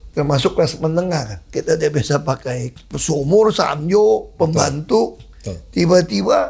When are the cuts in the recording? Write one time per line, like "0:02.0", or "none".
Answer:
0:01.5
0:02.9

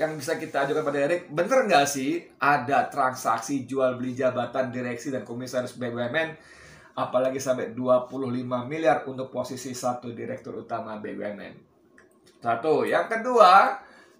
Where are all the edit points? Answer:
none

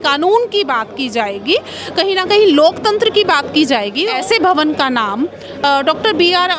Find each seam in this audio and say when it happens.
0:04.0

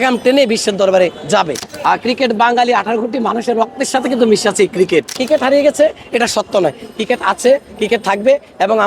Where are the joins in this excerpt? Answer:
0:01.6
0:05.2

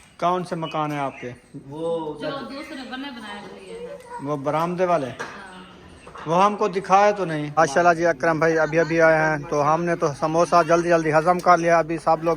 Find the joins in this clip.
0:07.5

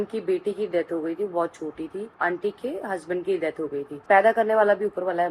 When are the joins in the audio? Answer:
0:02.1
0:04.0

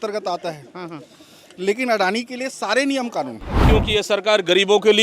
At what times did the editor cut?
0:03.7

